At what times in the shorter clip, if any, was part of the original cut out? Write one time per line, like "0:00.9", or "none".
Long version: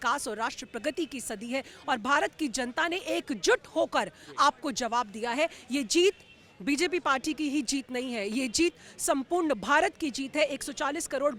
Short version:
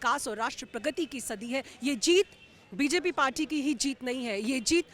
0:01.7